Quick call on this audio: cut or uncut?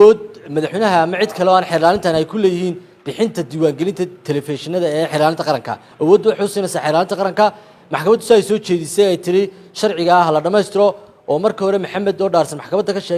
uncut